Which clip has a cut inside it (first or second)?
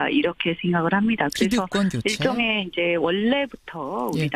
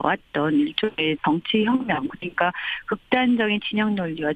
first